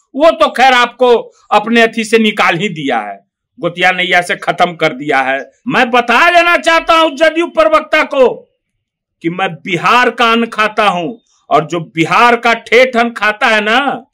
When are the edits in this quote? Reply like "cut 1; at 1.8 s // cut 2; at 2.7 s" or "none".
cut 1; at 5.5 s